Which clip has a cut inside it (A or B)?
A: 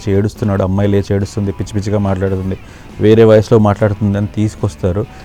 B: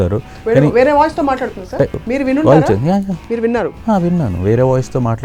B